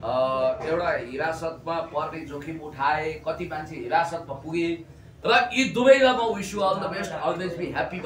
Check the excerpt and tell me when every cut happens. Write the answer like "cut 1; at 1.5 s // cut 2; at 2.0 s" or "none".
cut 1; at 5.1 s